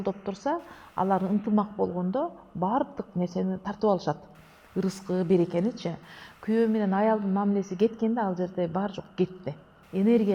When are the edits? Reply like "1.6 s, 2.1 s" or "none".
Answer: none